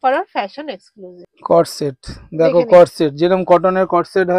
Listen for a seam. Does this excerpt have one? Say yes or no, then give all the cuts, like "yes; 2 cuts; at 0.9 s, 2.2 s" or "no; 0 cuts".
yes; 1 cut; at 1.2 s